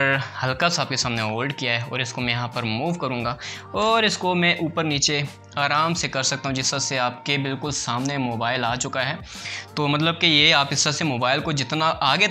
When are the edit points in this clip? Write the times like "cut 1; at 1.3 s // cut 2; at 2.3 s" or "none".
none